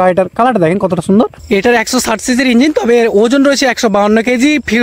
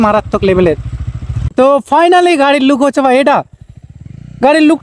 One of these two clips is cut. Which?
first; 1 cut; at 1.4 s

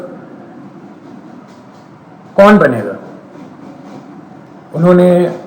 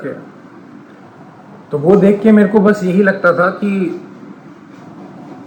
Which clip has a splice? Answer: first; 1 cut; at 4.5 s

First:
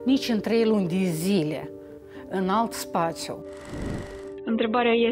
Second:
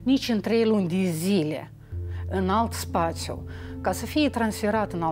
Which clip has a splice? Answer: first; 1 cut; at 3.8 s

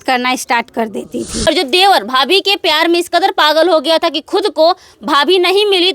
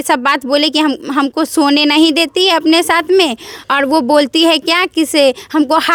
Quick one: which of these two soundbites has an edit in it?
first; 1 cut; at 1.4 s

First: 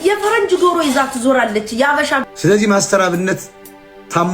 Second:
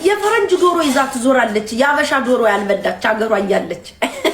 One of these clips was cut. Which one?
first; 1 cut; at 2.2 s

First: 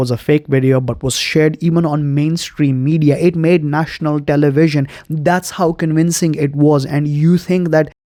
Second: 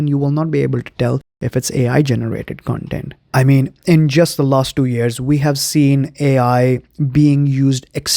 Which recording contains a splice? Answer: second; 1 cut; at 3.2 s

